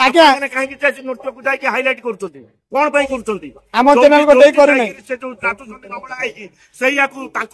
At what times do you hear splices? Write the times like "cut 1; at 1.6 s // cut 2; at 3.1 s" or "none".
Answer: none